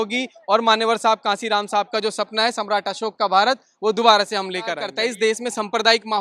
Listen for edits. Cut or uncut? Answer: cut